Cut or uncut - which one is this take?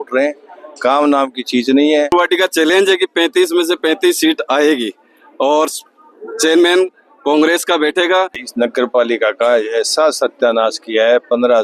cut